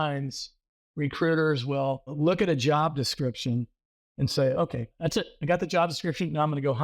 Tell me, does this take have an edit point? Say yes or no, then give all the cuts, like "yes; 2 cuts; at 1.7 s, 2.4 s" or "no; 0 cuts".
yes; 2 cuts; at 2.1 s, 4.9 s